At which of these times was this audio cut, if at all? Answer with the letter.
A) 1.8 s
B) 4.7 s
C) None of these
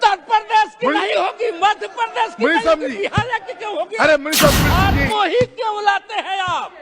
B